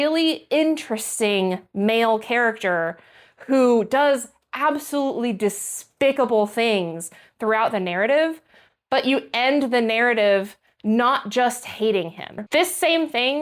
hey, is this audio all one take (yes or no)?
no